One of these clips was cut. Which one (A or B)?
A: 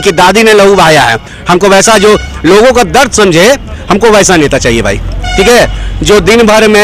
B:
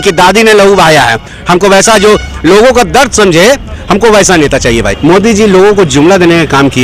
B